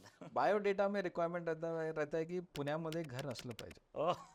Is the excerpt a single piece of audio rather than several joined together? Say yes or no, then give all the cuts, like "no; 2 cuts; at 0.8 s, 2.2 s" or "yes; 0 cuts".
yes; 0 cuts